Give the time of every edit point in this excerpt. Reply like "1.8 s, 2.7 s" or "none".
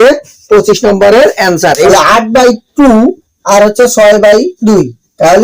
1.9 s